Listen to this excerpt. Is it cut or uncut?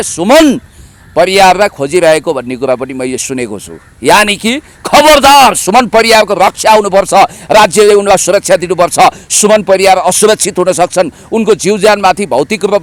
uncut